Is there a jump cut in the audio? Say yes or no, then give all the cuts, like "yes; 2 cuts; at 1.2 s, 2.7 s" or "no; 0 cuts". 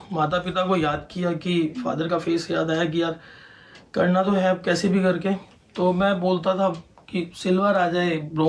no; 0 cuts